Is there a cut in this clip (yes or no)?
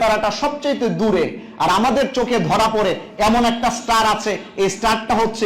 no